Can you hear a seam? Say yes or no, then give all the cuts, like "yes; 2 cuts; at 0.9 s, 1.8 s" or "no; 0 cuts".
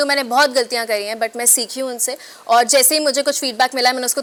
no; 0 cuts